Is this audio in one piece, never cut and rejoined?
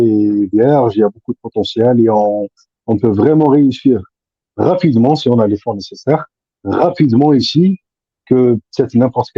yes; 0 cuts

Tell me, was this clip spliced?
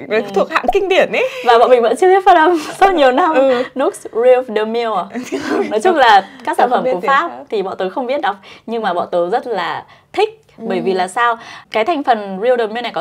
no; 0 cuts

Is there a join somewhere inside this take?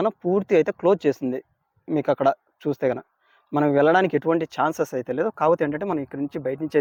no; 0 cuts

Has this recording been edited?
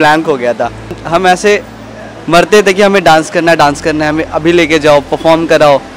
yes; 1 cut; at 1.0 s

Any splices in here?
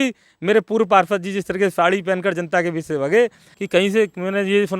yes; 1 cut; at 3.5 s

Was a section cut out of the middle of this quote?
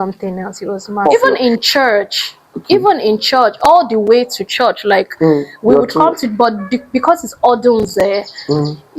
yes; 1 cut; at 1.1 s

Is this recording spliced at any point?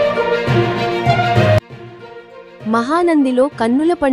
no; 0 cuts

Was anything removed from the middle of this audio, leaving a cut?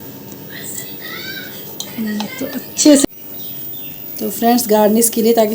yes; 1 cut; at 3.0 s

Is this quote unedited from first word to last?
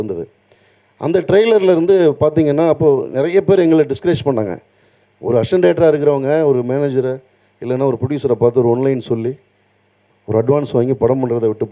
yes; 0 cuts

